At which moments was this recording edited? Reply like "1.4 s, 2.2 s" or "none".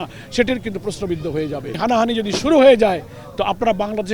1.8 s